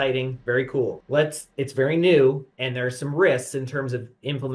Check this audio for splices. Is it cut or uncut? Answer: uncut